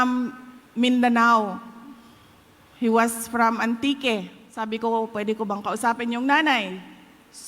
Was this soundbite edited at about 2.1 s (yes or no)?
no